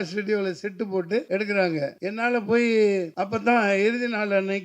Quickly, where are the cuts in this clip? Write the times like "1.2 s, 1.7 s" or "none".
1.3 s, 2.0 s, 3.1 s